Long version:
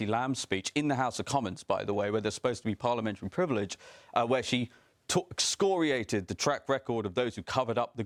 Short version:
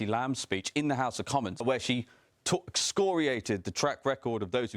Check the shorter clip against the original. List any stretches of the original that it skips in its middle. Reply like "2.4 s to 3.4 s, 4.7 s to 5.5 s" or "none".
1.6 s to 4.3 s